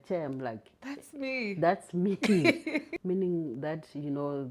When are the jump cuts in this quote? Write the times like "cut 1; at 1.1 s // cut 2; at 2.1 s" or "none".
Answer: cut 1; at 2.9 s